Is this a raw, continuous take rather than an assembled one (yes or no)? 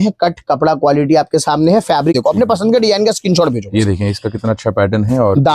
no